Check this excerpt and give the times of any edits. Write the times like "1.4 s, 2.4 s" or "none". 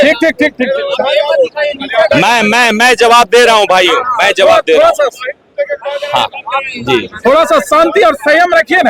none